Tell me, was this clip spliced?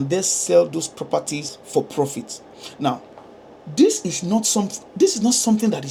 no; 0 cuts

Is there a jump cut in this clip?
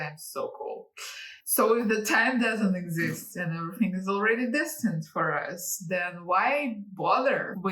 no; 0 cuts

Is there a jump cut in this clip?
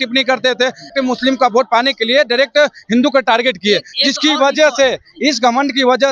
yes; 1 cut; at 0.9 s

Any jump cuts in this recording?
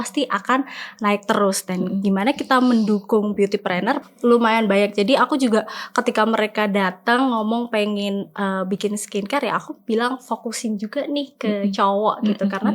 yes; 1 cut; at 4.1 s

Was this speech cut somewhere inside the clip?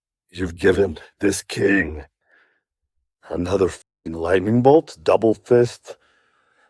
no; 0 cuts

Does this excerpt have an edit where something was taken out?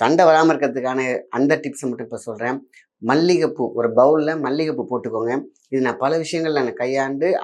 no; 0 cuts

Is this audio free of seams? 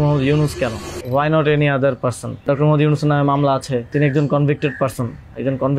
no; 3 cuts; at 0.9 s, 2.4 s, 3.9 s

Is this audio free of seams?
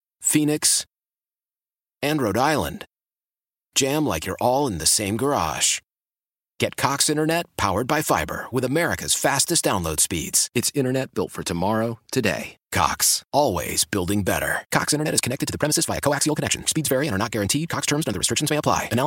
yes; 0 cuts

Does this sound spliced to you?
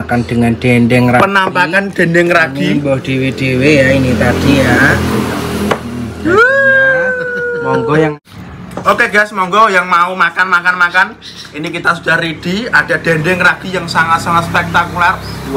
yes; 1 cut; at 8.1 s

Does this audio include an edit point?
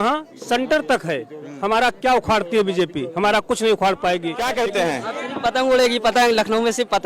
yes; 1 cut; at 4.4 s

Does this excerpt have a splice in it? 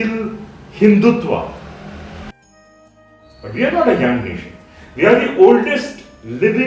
yes; 1 cut; at 2.7 s

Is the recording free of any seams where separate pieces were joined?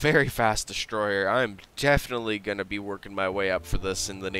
yes; 0 cuts

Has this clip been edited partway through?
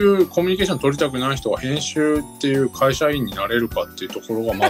no; 0 cuts

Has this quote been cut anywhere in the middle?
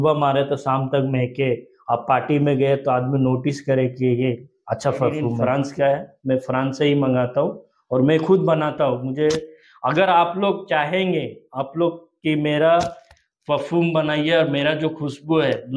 yes; 1 cut; at 5.4 s

